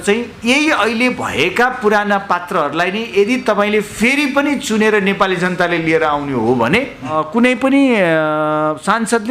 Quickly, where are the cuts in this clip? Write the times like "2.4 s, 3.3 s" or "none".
7.2 s